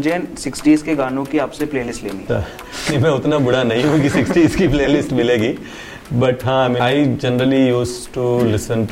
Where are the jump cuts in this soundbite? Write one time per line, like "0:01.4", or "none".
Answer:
0:02.2
0:06.8